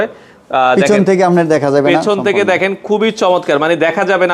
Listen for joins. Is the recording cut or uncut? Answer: uncut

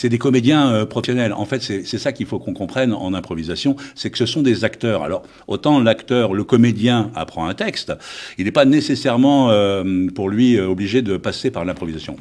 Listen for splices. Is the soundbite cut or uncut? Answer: cut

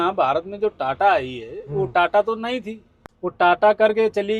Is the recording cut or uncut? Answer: uncut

